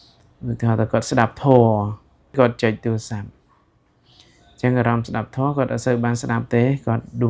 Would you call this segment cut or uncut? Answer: cut